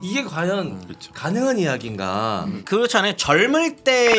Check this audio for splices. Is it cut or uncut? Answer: cut